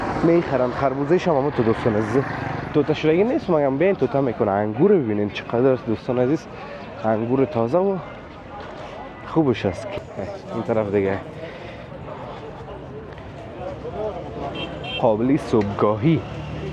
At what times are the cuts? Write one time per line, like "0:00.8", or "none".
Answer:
0:09.9